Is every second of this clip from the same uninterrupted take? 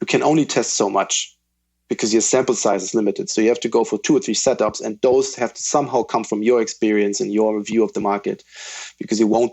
no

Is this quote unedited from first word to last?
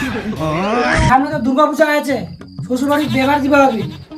no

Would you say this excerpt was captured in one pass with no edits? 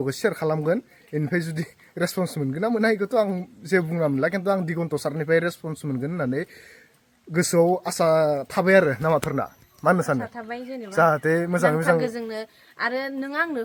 yes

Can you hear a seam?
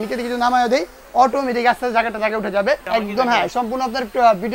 yes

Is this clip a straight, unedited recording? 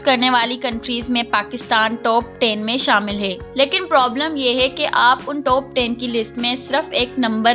yes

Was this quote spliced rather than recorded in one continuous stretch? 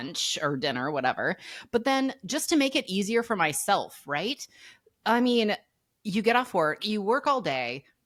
no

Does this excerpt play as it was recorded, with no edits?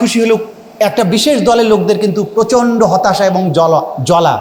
yes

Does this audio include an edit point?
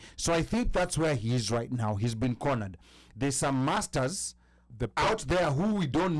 no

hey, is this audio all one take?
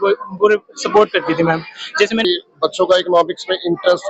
no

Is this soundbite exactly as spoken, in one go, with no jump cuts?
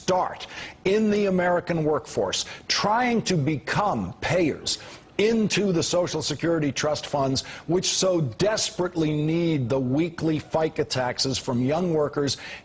no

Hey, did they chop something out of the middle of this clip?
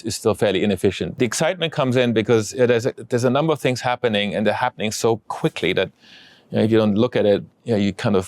yes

